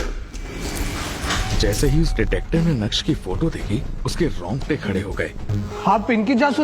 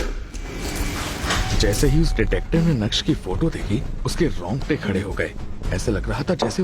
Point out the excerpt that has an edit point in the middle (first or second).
first